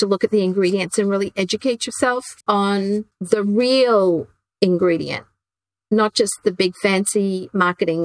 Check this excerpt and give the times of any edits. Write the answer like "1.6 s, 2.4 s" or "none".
2.3 s, 3.1 s